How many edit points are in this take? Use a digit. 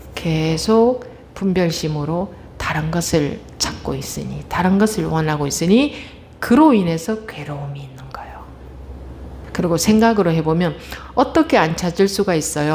1